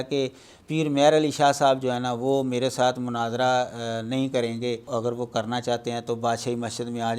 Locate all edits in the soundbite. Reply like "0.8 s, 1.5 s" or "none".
4.8 s